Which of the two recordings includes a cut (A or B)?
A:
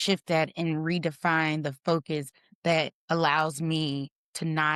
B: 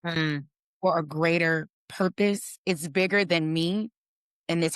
B